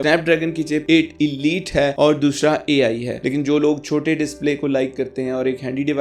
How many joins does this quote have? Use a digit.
1